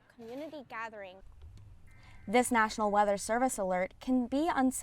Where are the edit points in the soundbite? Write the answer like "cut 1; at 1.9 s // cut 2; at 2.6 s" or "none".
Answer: cut 1; at 1.3 s